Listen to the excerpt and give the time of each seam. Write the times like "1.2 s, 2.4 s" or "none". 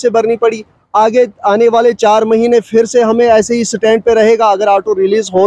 none